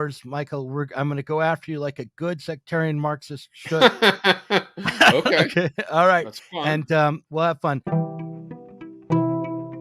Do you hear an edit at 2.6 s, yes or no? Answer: no